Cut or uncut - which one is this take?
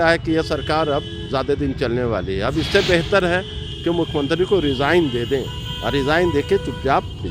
uncut